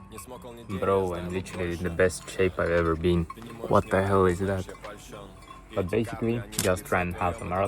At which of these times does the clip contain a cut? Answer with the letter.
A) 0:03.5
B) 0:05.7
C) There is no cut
C